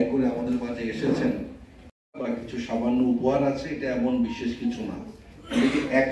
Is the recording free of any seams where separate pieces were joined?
yes; 0 cuts

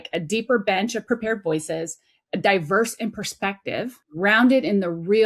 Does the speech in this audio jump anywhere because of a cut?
yes; 2 cuts; at 1.0 s, 4.0 s

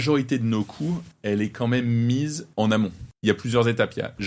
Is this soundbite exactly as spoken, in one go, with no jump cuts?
no; 3 cuts; at 1.1 s, 2.4 s, 3.1 s

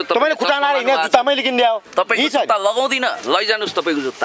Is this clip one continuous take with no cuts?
no; 1 cut; at 1.9 s

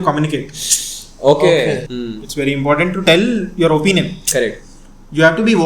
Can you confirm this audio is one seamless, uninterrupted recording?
no; 1 cut; at 1.9 s

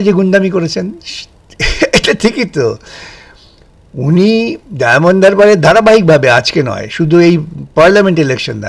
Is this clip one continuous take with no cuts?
yes; 0 cuts

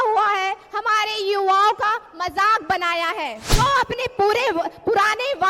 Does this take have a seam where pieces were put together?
yes; 1 cut; at 3.4 s

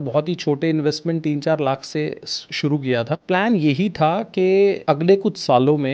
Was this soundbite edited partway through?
yes; 2 cuts; at 3.2 s, 4.8 s

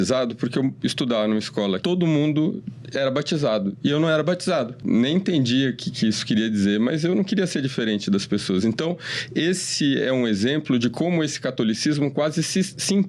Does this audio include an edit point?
yes; 2 cuts; at 1.8 s, 4.8 s

